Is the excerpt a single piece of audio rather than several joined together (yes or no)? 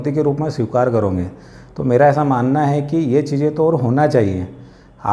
yes